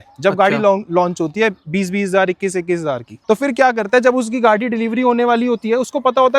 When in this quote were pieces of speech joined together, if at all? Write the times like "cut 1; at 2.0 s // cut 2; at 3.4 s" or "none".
none